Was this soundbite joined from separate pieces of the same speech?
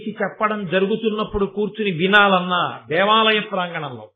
no; 0 cuts

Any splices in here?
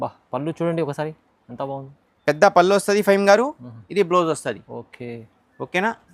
no; 0 cuts

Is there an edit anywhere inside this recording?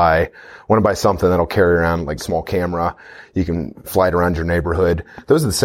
yes; 1 cut; at 2.2 s

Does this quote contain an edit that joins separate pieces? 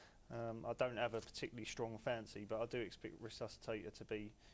no; 0 cuts

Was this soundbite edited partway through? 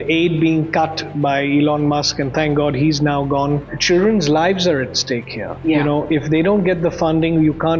yes; 1 cut; at 3.7 s

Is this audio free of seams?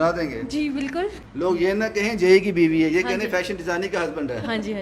no; 1 cut; at 1.2 s

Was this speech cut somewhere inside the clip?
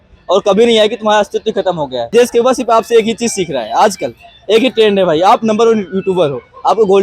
yes; 1 cut; at 2.1 s

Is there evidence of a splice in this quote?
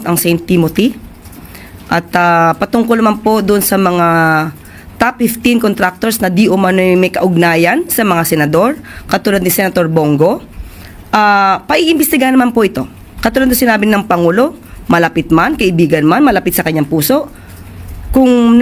no; 0 cuts

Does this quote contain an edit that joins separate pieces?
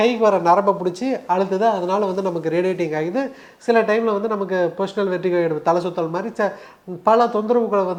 no; 0 cuts

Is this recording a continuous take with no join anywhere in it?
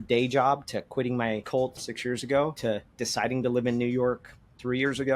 no; 2 cuts; at 1.8 s, 2.6 s

